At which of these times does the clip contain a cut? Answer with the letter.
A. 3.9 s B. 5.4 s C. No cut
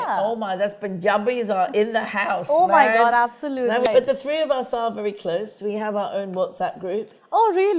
A